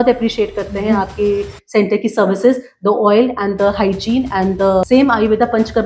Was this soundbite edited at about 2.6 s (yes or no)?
no